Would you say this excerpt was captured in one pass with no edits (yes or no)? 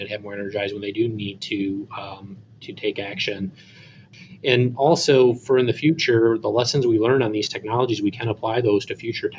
no